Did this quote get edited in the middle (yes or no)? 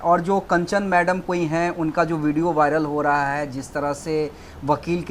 no